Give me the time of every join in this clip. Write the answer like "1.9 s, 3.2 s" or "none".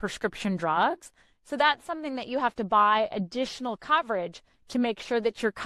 none